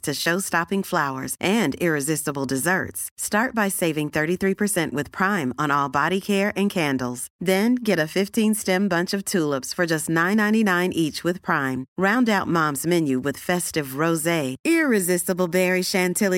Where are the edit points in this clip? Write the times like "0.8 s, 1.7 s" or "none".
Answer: none